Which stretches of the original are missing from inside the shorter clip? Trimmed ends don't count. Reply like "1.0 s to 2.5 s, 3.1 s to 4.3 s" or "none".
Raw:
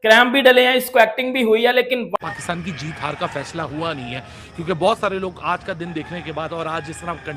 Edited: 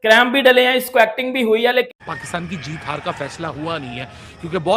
1.9 s to 2.1 s